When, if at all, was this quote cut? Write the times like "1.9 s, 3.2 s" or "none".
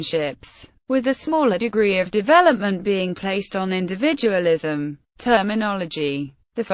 3.2 s